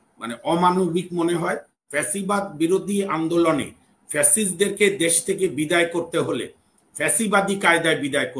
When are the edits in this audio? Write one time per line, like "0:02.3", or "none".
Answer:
0:01.8

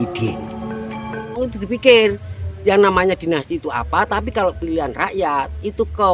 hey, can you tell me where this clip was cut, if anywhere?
0:01.4

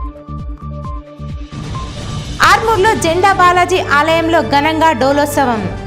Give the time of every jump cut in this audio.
none

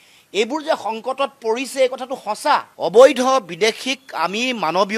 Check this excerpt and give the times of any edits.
0:02.7

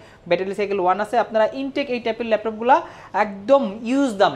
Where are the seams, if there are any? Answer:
none

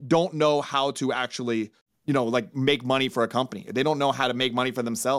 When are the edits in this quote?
0:01.9

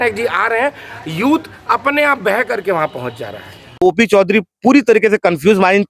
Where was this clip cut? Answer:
0:03.8

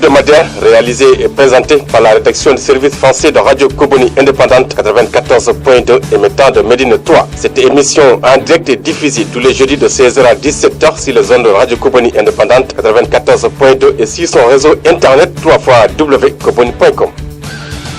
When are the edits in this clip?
none

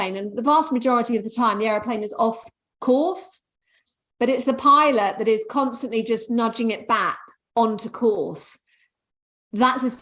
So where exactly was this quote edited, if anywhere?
none

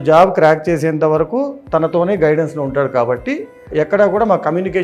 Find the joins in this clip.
0:03.7

